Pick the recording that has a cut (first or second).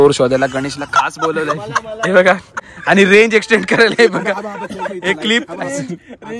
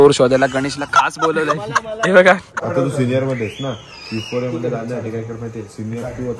second